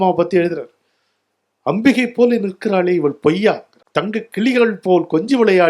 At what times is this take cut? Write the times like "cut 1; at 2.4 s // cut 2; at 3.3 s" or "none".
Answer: cut 1; at 3.7 s